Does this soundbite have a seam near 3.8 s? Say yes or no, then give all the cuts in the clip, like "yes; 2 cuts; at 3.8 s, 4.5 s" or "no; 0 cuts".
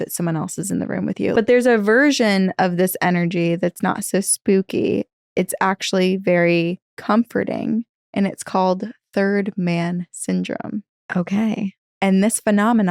no; 1 cut; at 1.3 s